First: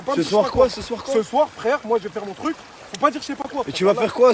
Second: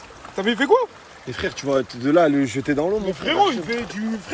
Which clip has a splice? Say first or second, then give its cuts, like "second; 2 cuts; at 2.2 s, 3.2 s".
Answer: first; 1 cut; at 3.5 s